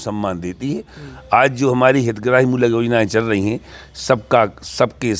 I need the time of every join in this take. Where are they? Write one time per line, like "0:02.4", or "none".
none

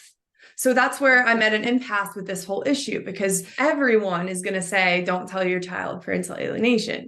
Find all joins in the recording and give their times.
0:03.5

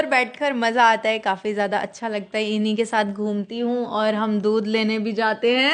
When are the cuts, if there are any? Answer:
none

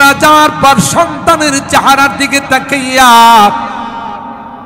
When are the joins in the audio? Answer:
none

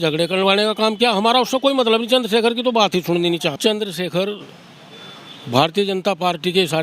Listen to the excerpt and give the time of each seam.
0:03.6

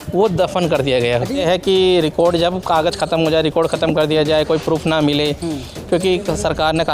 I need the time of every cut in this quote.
0:01.4

